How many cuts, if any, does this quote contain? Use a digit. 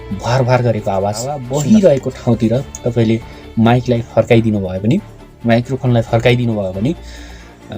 1